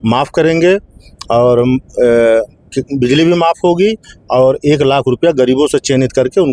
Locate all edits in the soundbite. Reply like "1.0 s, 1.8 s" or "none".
none